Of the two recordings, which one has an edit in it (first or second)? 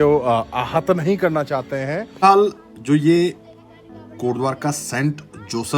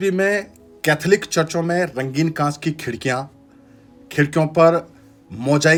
first